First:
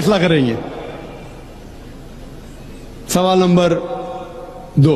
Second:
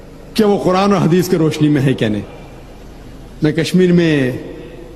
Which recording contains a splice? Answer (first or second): first